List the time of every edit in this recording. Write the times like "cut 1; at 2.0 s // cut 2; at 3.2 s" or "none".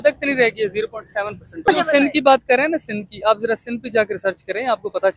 cut 1; at 1.7 s